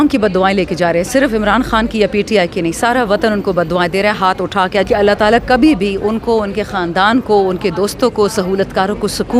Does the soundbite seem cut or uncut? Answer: cut